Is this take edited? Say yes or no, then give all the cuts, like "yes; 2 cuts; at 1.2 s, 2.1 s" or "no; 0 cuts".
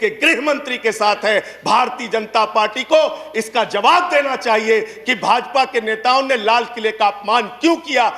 no; 0 cuts